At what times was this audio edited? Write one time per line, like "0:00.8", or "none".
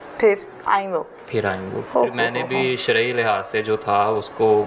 0:01.8